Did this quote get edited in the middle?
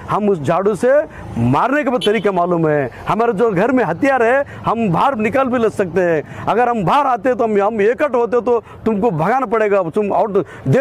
no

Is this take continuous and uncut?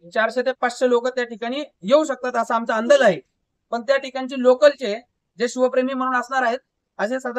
yes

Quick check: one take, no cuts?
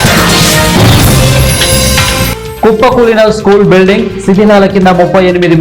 yes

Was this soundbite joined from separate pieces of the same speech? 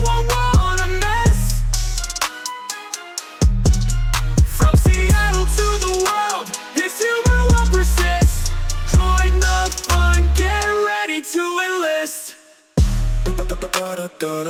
no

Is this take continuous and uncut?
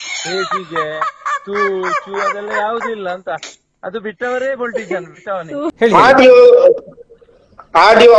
no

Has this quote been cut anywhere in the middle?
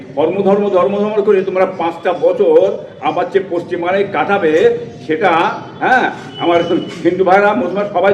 no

